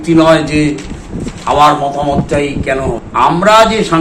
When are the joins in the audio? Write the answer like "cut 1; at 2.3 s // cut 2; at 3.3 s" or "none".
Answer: cut 1; at 3.0 s